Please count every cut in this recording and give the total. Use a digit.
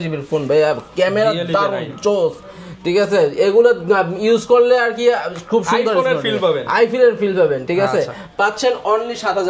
0